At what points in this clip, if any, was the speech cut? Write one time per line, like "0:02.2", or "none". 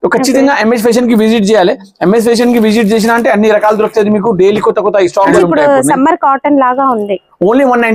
0:05.3